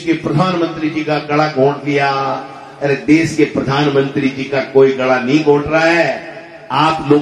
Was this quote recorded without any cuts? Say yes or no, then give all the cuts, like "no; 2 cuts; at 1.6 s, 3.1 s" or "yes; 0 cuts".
yes; 0 cuts